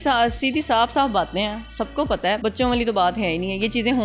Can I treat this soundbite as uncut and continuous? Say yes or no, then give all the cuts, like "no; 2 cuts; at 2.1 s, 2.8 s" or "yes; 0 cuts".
no; 1 cut; at 2.4 s